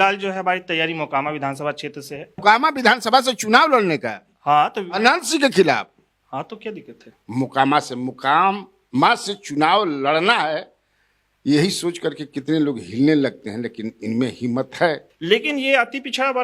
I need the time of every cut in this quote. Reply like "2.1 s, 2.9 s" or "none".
2.3 s, 7.1 s, 15.1 s